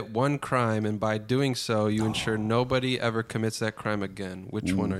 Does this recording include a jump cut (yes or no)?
no